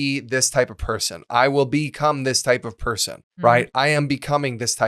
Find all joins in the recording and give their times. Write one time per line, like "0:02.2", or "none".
0:03.3